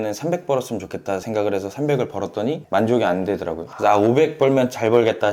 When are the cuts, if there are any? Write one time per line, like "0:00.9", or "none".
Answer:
0:01.2